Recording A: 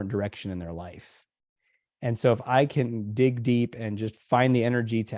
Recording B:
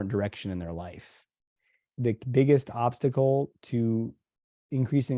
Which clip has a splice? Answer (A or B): B